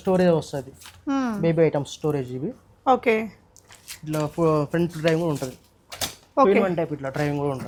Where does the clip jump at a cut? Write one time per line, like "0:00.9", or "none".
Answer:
none

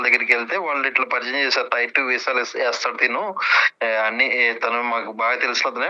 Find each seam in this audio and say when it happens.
none

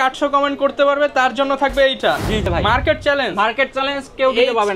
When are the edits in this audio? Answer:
0:02.4

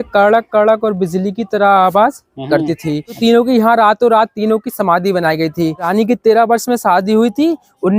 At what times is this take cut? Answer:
0:03.2
0:05.9

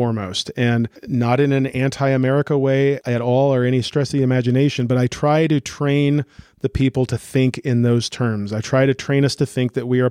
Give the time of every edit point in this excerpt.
0:01.0
0:03.0

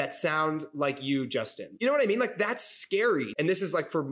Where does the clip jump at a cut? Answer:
0:01.6
0:03.3

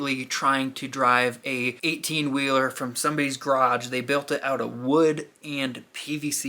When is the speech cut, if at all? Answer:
0:01.8

